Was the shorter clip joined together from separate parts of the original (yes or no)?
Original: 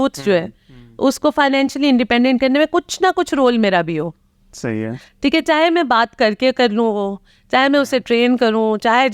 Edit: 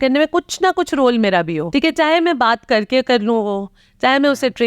yes